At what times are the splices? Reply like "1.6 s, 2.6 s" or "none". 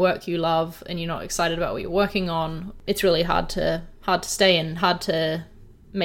2.7 s

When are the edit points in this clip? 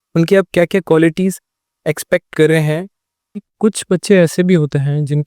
3.5 s

